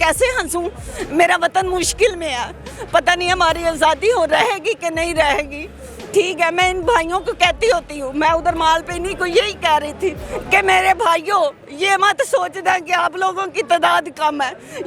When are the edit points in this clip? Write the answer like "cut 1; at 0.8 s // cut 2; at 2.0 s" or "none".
none